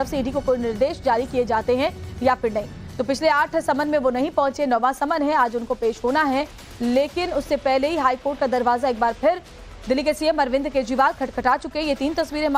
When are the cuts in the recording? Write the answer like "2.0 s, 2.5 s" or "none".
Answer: 1.5 s

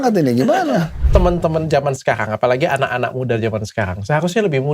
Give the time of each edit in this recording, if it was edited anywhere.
1.0 s

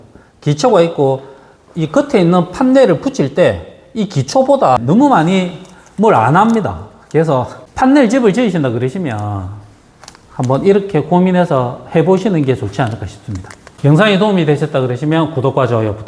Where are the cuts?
4.6 s

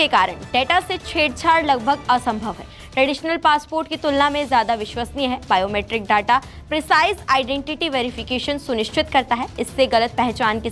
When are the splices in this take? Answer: none

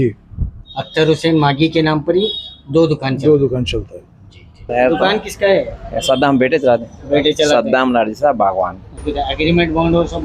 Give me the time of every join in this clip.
4.7 s, 9.1 s

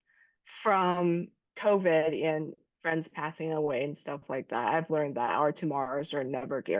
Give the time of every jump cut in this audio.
none

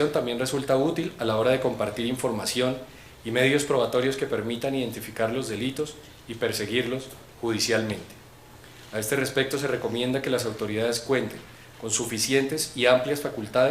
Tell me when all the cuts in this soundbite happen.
12.7 s

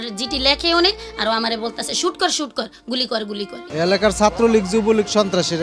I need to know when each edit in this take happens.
3.6 s

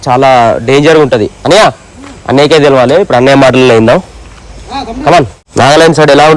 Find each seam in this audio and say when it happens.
none

